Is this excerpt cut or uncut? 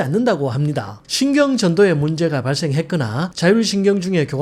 cut